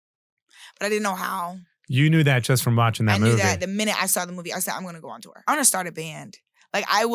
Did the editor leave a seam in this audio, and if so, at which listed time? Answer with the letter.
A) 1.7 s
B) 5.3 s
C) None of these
B